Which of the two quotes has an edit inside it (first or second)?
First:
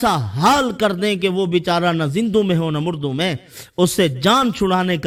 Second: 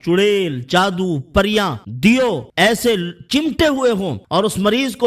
second